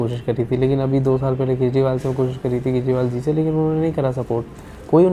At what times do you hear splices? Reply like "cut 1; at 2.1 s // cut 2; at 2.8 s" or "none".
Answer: none